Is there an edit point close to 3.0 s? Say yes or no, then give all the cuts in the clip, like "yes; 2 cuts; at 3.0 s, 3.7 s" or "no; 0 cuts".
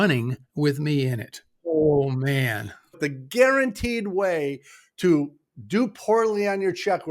yes; 2 cuts; at 1.6 s, 3.0 s